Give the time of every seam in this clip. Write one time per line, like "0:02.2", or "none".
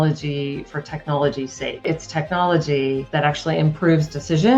0:01.8
0:03.1

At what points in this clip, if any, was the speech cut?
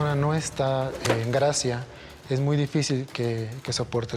none

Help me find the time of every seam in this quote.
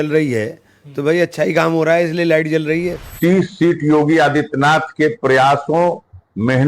0:03.1

